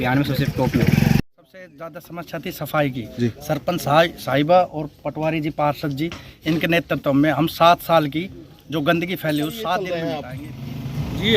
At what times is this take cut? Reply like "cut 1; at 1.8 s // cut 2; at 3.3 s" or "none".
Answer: cut 1; at 1.2 s // cut 2; at 10.3 s